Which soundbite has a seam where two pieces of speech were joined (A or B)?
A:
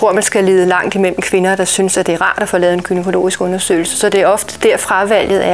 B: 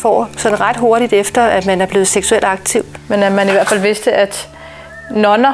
B